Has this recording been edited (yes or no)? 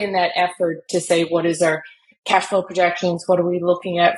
no